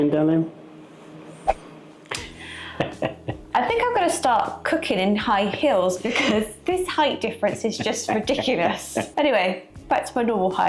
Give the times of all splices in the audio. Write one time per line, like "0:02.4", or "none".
none